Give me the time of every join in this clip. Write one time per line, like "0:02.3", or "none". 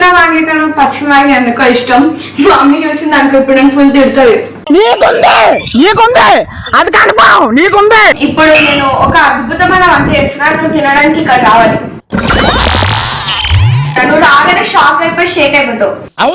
0:08.2
0:13.9